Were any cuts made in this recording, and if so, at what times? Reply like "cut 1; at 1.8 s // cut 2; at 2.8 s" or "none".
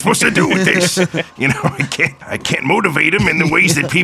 cut 1; at 1.8 s

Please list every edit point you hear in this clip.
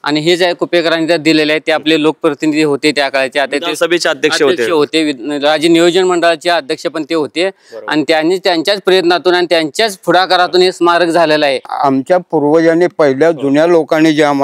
cut 1; at 11.7 s

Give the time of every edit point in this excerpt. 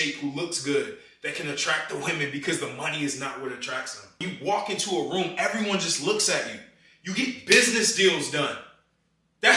cut 1; at 4.2 s

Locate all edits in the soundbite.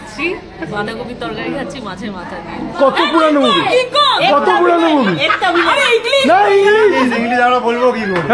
cut 1; at 2.7 s

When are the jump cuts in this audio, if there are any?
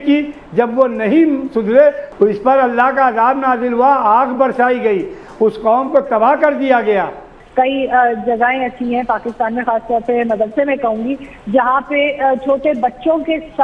cut 1; at 2.1 s // cut 2; at 7.4 s

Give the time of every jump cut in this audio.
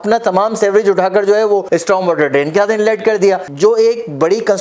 cut 1; at 3.4 s

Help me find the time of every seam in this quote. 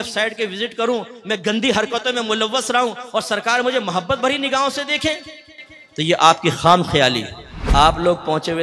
cut 1; at 7.6 s

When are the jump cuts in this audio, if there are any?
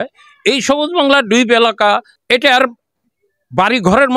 cut 1; at 2.1 s

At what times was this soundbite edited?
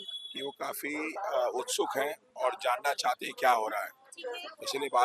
none

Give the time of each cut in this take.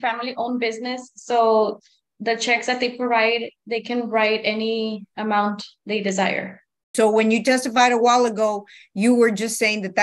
cut 1; at 6.9 s

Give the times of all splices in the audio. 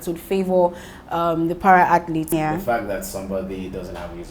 cut 1; at 2.3 s

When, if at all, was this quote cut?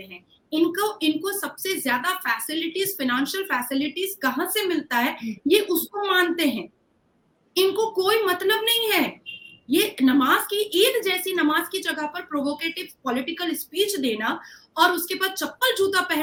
none

